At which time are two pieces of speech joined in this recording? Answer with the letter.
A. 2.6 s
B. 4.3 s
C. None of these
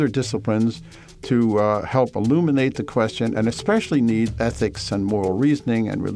B